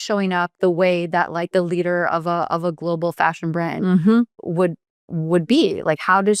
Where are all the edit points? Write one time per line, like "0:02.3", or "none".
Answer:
none